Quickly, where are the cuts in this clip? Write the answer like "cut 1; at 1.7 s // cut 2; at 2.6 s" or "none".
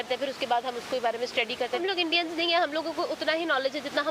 cut 1; at 1.8 s

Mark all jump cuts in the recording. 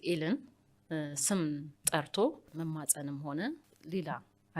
cut 1; at 2.4 s // cut 2; at 3.7 s

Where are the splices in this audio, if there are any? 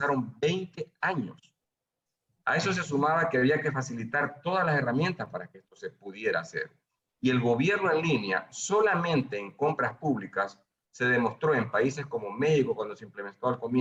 none

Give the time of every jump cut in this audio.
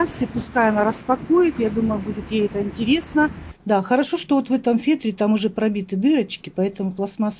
cut 1; at 3.5 s

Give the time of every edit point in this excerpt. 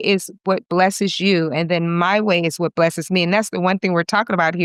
none

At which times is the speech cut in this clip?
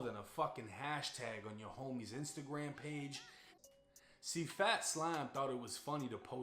cut 1; at 3.5 s

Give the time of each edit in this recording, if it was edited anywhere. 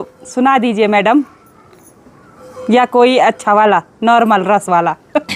none

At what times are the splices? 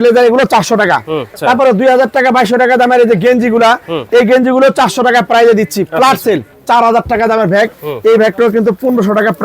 cut 1; at 1.3 s // cut 2; at 6.5 s

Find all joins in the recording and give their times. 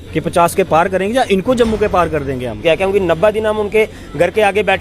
cut 1; at 2.6 s

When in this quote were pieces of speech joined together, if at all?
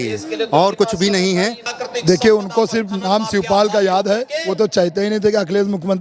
cut 1; at 1.7 s

